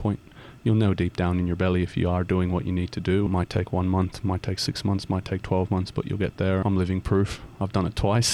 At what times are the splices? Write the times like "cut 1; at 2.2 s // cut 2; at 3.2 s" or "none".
cut 1; at 3.3 s // cut 2; at 6.6 s